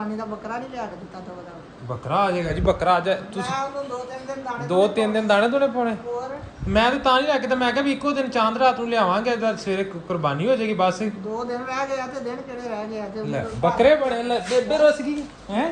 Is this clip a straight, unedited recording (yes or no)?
yes